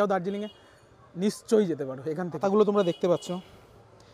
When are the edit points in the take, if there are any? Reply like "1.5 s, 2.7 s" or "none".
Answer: 2.4 s